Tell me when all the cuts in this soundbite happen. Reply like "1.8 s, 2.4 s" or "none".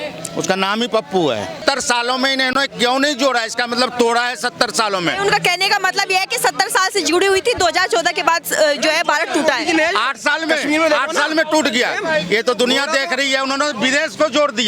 1.6 s